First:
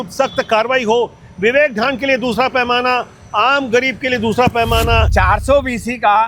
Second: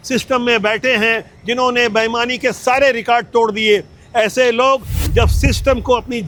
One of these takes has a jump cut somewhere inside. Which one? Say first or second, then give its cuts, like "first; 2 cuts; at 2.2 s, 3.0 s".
first; 1 cut; at 5.1 s